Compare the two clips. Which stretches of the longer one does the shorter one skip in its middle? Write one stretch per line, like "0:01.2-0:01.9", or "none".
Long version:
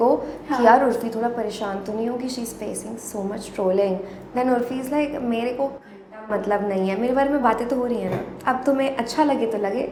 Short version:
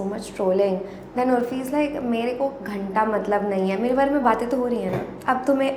none